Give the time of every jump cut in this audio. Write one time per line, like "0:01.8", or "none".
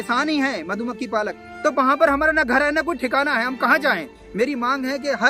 0:01.4
0:04.2